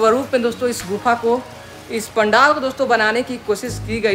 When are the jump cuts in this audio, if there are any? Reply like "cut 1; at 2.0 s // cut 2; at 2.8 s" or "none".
none